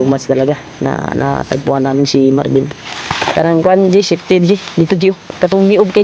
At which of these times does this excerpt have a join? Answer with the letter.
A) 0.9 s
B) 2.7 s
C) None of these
B